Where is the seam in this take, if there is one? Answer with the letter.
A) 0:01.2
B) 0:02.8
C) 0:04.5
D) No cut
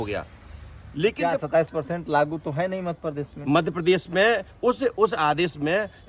A